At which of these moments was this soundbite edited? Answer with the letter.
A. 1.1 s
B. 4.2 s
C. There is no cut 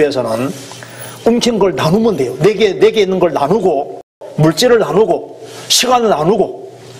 B